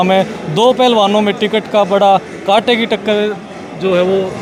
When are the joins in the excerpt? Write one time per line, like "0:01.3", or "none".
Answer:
none